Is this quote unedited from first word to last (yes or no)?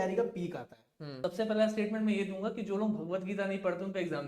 no